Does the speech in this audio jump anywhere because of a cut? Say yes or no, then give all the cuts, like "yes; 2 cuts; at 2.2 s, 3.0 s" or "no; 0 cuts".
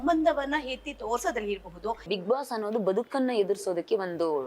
yes; 1 cut; at 2.1 s